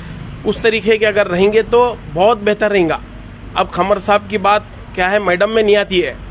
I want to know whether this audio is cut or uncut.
uncut